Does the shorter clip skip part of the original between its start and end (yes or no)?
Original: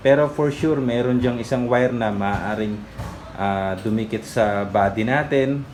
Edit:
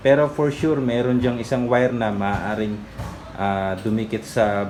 no